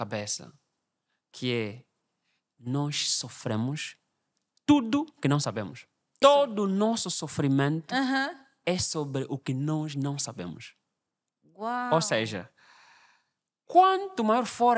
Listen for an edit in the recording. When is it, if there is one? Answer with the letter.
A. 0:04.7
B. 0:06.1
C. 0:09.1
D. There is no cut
B